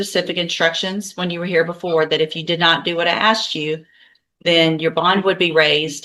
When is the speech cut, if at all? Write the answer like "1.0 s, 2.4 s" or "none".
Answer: none